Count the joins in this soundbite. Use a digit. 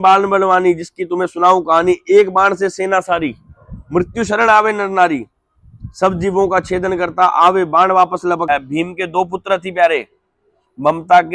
1